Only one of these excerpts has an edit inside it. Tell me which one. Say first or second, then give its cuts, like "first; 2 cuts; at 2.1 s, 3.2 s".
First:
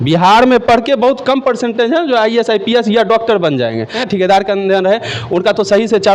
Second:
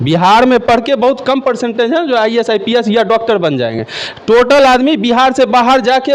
first; 1 cut; at 4.0 s